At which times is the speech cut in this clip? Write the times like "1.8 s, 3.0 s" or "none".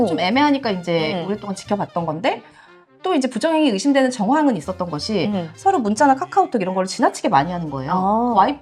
none